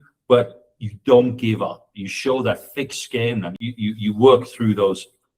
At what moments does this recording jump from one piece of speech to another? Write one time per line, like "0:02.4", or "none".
0:03.5